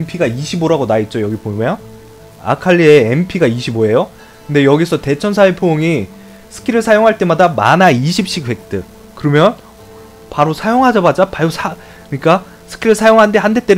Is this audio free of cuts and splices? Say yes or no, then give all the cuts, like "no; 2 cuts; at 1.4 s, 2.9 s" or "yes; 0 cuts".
yes; 0 cuts